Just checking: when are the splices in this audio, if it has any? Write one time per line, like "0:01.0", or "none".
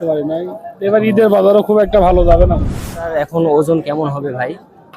0:03.1